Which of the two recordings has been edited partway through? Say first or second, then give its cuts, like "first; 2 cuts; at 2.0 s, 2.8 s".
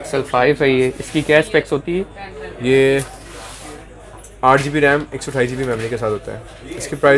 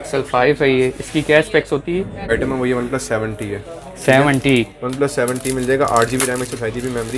second; 1 cut; at 2.3 s